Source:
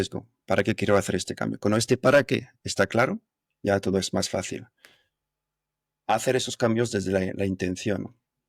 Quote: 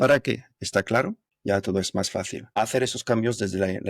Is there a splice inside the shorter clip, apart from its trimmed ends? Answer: yes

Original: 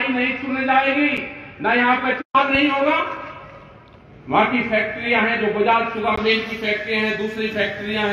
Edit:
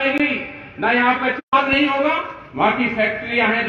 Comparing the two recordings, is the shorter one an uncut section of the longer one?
no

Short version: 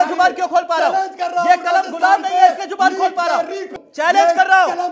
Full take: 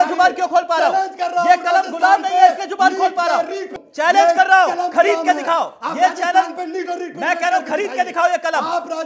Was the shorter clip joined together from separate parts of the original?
no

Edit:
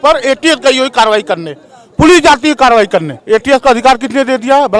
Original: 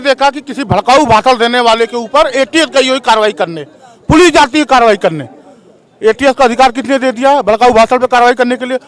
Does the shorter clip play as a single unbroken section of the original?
no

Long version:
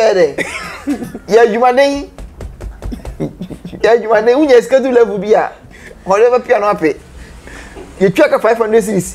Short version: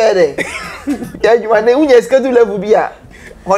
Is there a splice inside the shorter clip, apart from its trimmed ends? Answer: yes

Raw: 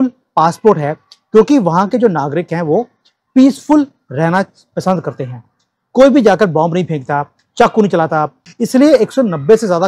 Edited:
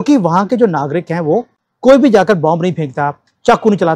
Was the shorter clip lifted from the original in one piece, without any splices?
no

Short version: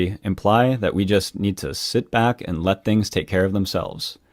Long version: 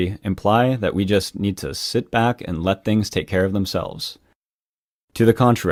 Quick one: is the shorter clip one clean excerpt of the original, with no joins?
yes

